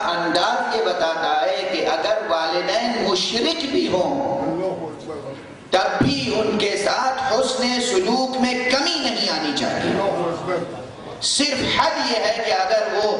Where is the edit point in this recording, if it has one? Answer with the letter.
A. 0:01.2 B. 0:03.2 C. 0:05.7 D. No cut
D